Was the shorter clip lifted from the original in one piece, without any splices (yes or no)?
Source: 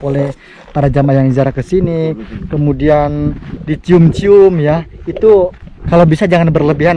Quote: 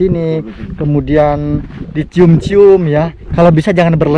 no